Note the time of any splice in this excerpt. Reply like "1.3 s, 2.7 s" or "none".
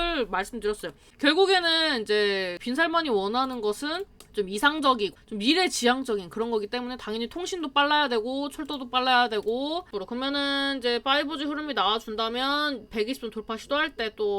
1.0 s, 2.6 s, 4.1 s, 5.3 s, 9.9 s